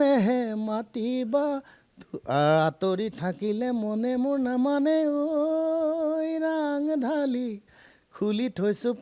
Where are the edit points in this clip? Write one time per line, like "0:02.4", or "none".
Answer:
none